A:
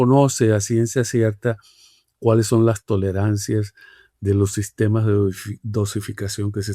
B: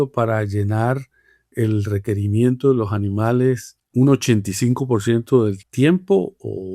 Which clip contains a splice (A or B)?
B